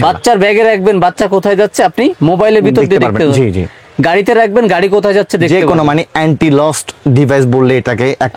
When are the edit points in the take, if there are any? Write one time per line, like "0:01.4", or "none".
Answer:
none